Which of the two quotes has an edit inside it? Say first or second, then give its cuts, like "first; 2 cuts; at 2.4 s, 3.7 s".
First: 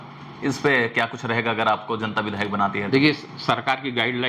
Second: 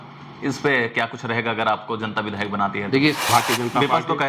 second; 1 cut; at 3.2 s